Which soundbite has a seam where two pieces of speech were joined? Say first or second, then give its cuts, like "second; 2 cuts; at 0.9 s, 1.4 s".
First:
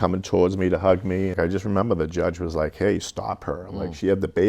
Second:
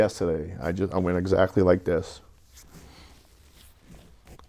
first; 1 cut; at 1.3 s